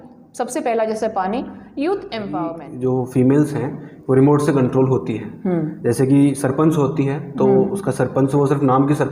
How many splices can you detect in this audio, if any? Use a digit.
1